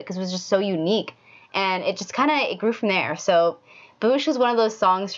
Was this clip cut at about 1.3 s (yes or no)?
no